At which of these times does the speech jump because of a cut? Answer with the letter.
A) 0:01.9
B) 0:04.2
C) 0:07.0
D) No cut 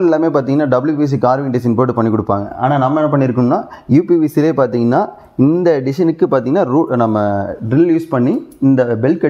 D